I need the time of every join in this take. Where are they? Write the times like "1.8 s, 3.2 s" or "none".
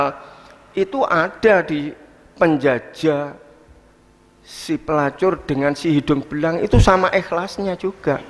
none